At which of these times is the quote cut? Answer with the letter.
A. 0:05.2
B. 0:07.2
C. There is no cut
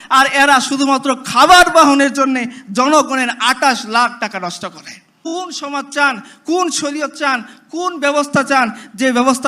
A